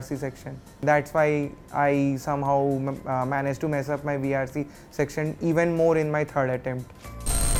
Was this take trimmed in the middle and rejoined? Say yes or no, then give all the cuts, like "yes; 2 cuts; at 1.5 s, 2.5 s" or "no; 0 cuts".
no; 0 cuts